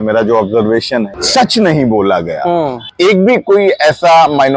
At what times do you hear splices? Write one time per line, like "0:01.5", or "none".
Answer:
0:01.2
0:02.8